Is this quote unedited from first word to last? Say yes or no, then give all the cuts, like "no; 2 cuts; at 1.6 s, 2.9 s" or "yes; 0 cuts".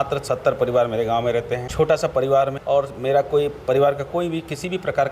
no; 2 cuts; at 1.7 s, 2.6 s